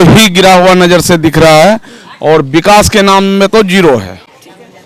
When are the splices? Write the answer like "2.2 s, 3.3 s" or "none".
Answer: none